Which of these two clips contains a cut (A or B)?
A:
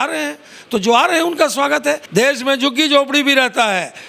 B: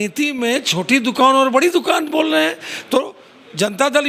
A